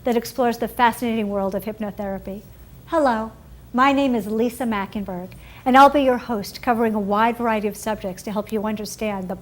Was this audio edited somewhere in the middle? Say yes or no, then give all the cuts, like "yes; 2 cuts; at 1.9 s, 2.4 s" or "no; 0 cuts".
yes; 1 cut; at 5.5 s